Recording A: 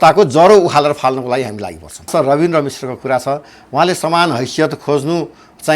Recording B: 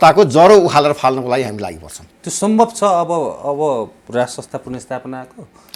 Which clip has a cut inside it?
A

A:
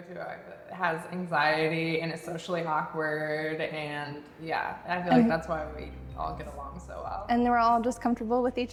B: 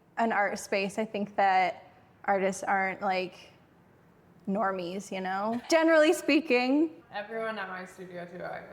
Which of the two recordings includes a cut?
B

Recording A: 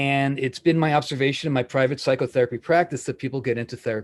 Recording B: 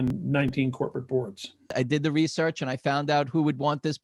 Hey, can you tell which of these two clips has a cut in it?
B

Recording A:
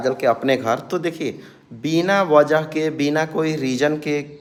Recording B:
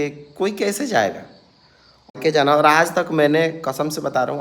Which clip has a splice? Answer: B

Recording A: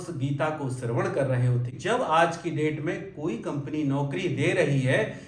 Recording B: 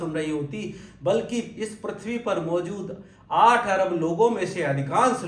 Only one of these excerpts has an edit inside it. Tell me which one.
A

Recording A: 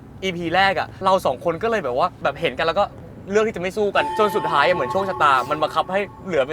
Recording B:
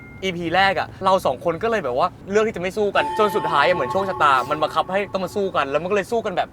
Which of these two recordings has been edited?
B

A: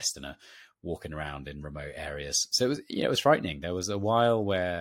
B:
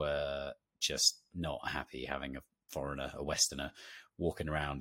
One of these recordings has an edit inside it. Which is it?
A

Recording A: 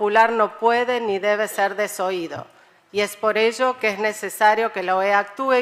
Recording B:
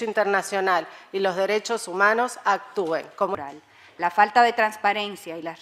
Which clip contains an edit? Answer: B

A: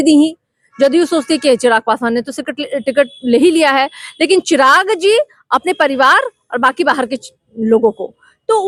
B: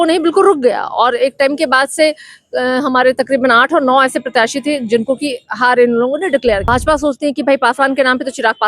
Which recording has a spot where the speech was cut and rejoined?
B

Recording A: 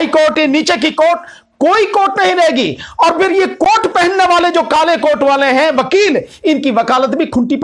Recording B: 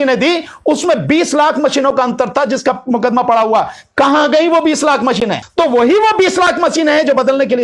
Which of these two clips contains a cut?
B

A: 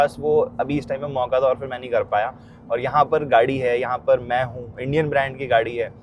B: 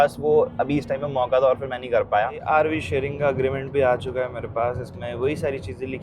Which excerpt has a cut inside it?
B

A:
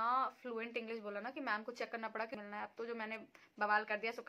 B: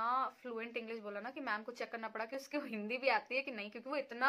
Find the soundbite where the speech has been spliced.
A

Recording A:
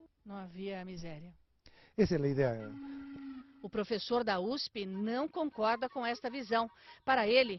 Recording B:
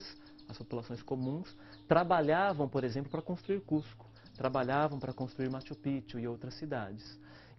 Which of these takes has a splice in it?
B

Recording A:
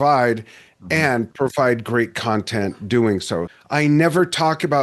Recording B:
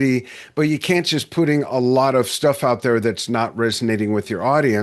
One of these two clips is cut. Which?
A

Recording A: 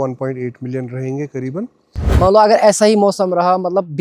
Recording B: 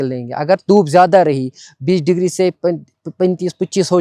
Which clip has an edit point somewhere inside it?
A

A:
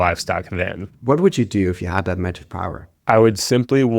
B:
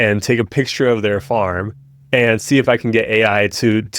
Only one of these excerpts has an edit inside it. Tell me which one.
A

